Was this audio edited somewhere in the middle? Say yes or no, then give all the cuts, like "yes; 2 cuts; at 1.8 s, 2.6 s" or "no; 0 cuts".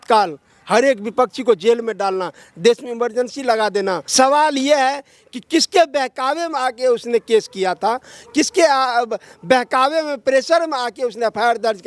yes; 1 cut; at 4.0 s